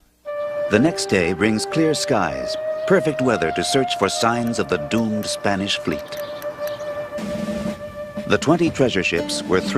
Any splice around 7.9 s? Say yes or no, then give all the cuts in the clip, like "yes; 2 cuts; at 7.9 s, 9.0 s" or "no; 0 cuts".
no; 1 cut; at 4.8 s